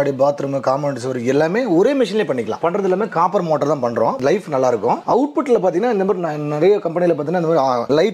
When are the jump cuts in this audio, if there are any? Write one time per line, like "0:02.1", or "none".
0:02.6
0:05.0